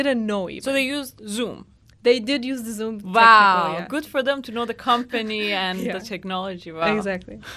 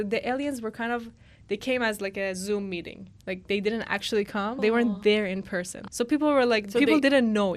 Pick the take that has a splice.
second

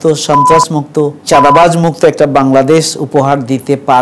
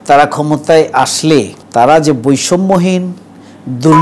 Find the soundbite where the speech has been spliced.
first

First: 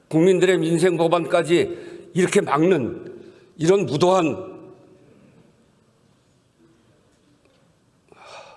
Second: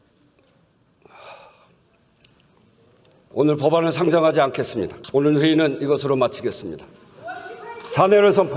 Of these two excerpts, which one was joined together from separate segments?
second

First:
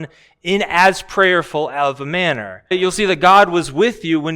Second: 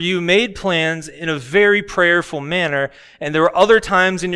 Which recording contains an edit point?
first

